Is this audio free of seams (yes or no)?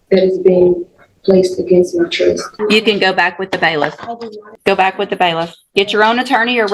no